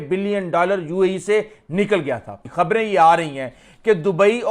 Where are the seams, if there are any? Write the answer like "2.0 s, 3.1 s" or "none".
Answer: 2.4 s